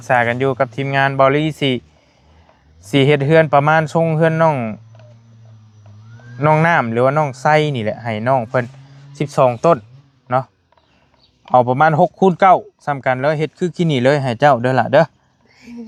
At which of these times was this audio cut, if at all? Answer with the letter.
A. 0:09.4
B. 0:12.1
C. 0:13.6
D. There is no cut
D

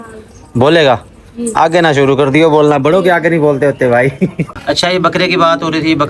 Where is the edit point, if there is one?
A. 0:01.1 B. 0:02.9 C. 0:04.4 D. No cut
C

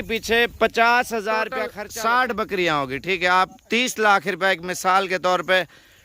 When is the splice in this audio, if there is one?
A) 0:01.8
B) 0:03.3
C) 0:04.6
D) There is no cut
A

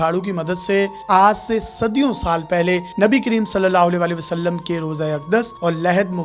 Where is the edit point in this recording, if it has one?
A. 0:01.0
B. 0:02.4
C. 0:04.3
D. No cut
A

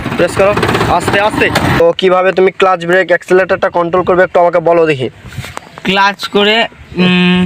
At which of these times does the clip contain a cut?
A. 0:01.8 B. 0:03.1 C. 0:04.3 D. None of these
A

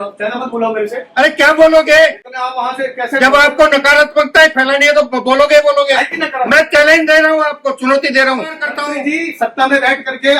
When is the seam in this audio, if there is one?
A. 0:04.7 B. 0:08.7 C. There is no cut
B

